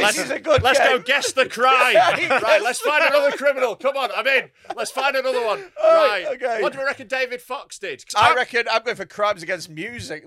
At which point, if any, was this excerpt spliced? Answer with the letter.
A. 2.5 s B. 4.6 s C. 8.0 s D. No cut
C